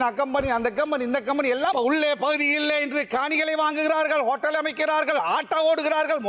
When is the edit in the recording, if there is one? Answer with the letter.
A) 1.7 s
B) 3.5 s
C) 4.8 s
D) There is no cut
A